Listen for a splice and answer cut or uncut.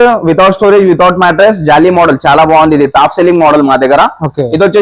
uncut